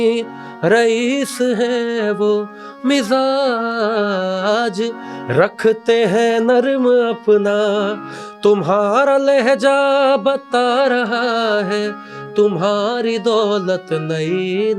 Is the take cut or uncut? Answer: uncut